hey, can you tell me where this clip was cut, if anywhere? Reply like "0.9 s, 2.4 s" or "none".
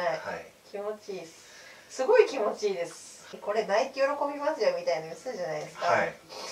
3.3 s